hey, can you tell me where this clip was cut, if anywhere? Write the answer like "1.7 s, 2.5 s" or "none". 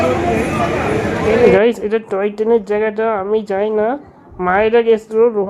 1.5 s